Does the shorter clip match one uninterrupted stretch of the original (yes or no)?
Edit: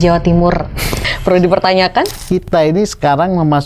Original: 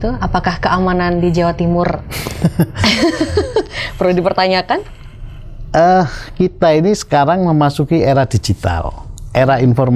no